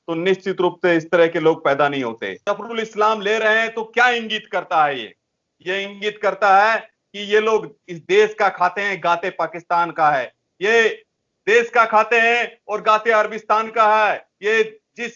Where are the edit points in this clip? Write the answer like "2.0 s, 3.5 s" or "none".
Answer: 2.3 s